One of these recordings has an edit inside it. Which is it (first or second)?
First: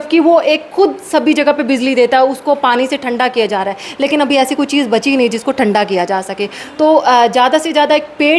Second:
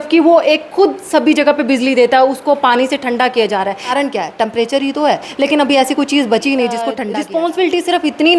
second